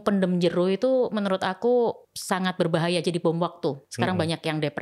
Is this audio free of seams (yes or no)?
no